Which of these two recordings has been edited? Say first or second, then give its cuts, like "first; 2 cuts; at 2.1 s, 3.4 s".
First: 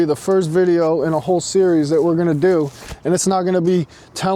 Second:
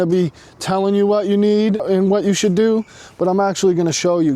second; 1 cut; at 1.8 s